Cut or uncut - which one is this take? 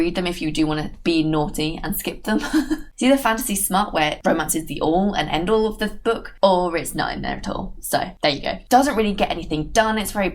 cut